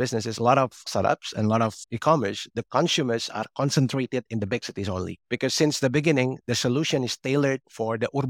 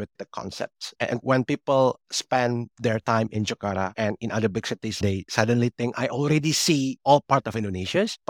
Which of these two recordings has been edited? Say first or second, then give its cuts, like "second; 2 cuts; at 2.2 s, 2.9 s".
second; 2 cuts; at 1.0 s, 5.0 s